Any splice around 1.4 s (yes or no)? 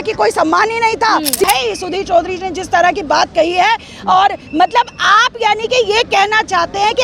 yes